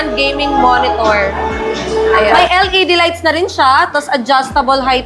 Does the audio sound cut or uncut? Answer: cut